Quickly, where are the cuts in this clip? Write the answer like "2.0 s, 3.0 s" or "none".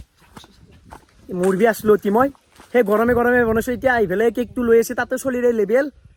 none